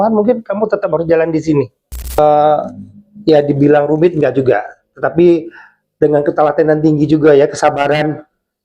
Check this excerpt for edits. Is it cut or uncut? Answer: cut